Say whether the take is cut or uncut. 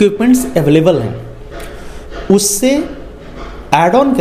uncut